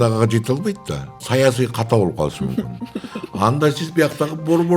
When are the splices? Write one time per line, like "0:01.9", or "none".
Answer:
0:01.2